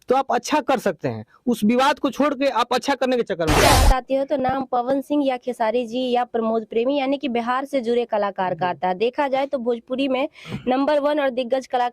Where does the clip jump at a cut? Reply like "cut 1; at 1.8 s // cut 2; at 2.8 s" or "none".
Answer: cut 1; at 3.6 s